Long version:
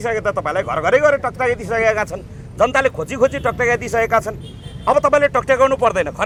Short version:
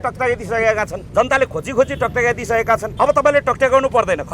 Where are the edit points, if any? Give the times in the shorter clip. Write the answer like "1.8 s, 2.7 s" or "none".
1.0 s, 2.9 s